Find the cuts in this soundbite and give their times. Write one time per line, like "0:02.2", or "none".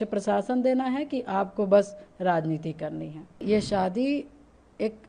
0:03.4